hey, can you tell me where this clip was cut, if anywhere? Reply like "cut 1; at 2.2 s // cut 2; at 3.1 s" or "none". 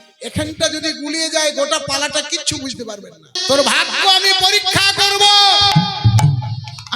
cut 1; at 3.3 s